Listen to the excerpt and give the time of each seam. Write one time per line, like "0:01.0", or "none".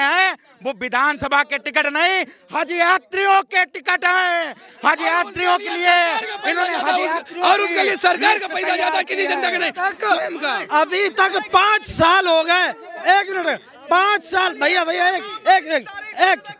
none

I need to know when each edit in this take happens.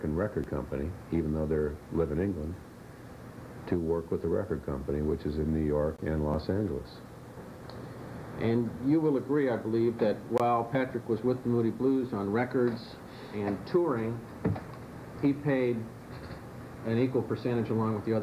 none

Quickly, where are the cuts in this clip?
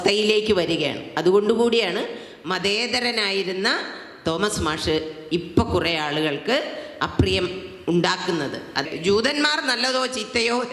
0:08.9

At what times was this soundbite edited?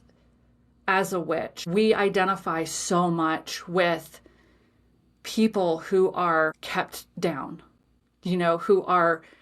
0:01.6
0:06.6

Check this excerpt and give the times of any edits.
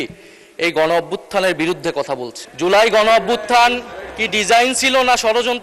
0:02.4

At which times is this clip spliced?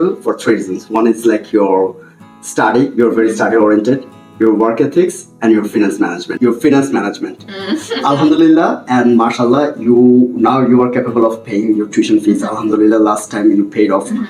0:06.3

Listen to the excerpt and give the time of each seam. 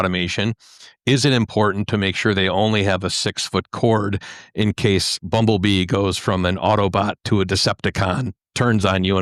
none

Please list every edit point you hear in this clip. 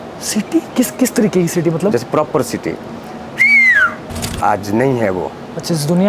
0:04.1

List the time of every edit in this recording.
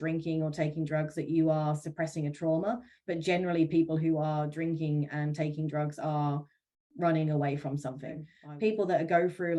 0:08.4

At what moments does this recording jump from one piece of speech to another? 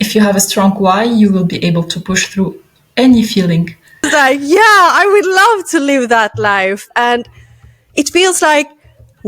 0:04.3

